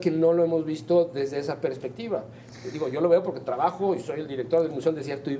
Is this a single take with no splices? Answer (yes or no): yes